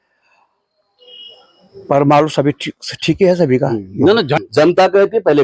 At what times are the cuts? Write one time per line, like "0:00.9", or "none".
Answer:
0:04.3